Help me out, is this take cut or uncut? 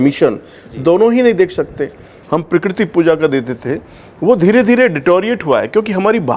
cut